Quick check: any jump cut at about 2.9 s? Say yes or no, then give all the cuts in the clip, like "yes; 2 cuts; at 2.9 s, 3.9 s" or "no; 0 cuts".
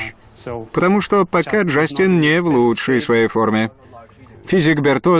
no; 1 cut; at 4.2 s